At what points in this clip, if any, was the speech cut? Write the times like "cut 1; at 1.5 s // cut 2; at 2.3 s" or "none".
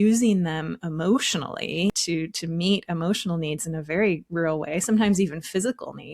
cut 1; at 2.0 s